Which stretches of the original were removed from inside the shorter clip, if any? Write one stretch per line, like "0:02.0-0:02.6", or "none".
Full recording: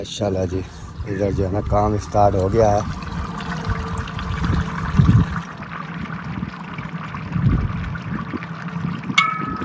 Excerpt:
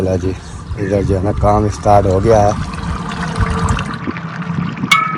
0:04.2-0:08.1